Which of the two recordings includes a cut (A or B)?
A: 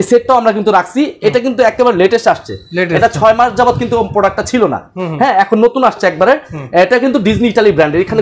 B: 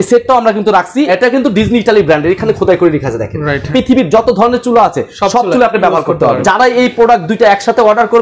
B